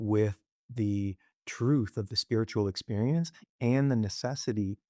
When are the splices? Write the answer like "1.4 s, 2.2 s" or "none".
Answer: none